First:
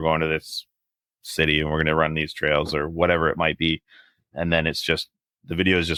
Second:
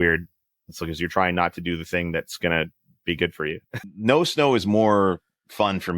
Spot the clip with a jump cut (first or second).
second